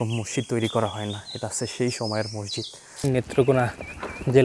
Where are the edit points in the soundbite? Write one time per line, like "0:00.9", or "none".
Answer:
0:02.8